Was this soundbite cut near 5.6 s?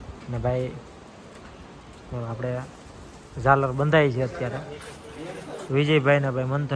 yes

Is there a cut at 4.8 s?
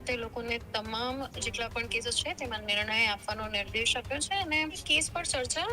yes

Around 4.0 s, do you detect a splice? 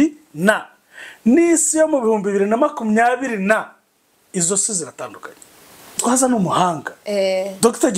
no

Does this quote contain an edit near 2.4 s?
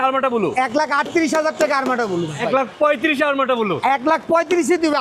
yes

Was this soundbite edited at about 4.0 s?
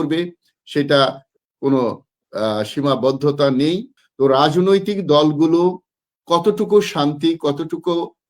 yes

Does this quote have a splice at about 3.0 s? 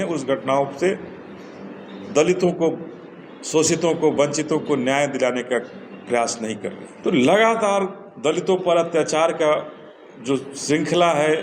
no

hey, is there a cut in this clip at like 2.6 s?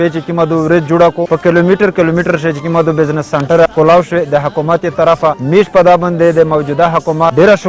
no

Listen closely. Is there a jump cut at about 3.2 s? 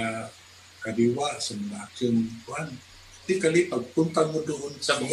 yes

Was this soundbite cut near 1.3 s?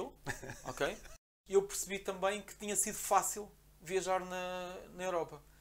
yes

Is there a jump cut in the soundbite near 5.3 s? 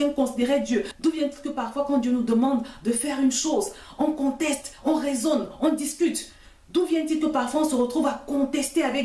no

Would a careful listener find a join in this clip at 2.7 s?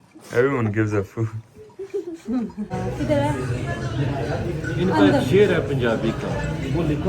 yes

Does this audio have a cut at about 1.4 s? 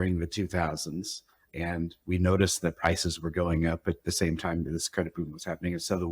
yes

